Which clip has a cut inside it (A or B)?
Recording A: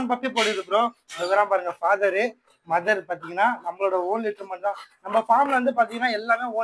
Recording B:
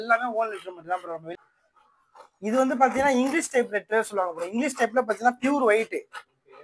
B